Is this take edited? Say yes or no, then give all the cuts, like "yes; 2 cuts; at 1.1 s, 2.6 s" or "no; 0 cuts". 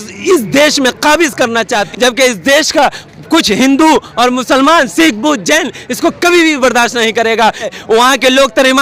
yes; 2 cuts; at 1.9 s, 7.7 s